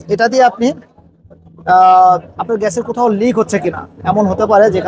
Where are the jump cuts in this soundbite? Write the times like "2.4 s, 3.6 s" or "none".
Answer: none